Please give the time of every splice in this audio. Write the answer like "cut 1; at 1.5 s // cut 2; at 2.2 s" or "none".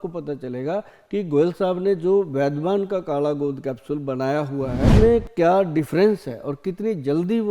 cut 1; at 4.9 s